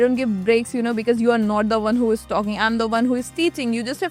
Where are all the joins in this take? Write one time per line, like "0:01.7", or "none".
none

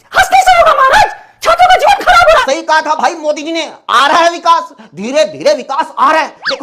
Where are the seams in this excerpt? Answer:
0:02.4

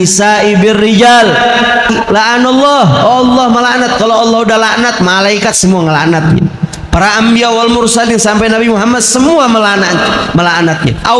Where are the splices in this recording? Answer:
0:01.9

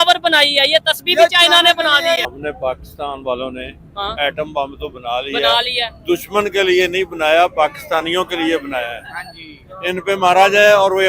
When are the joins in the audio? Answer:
0:02.3

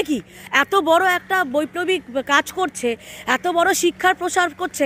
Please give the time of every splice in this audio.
none

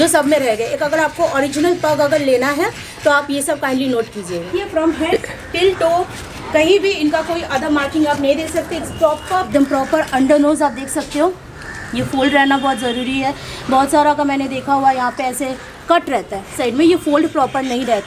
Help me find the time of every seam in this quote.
0:04.5
0:09.5
0:16.6

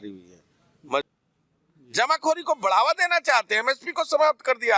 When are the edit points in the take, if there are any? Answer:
0:01.1

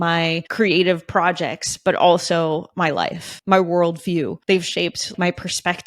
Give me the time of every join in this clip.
0:03.3
0:04.6

